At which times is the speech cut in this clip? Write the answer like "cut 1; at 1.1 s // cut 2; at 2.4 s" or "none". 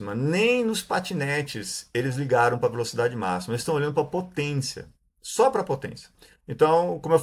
cut 1; at 6.2 s